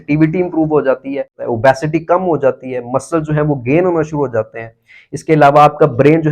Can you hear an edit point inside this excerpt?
yes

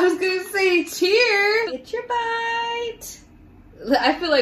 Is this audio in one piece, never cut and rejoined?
no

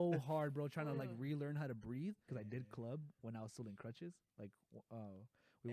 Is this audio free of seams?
no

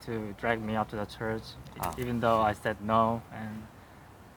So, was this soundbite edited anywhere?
no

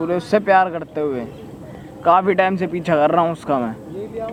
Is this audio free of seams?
yes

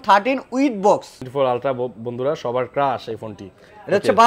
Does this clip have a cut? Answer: yes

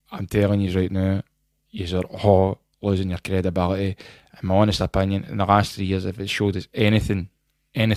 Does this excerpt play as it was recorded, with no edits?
yes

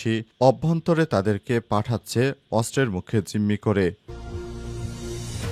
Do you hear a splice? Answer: yes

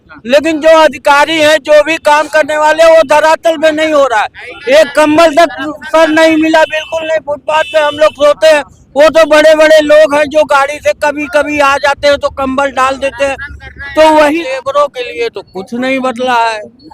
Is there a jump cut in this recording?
yes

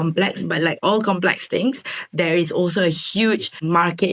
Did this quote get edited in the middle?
no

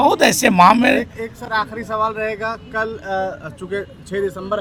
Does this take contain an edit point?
no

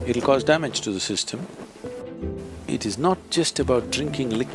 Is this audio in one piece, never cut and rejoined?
no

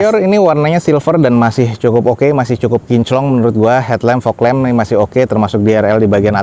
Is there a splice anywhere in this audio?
no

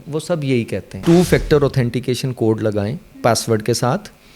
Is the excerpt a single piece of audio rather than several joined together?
no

